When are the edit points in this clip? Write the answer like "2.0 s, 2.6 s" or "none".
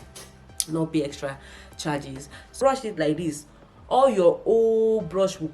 2.5 s